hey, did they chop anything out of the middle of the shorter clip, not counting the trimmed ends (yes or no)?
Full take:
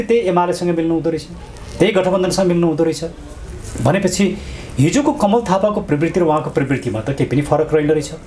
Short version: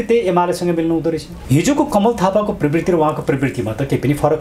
yes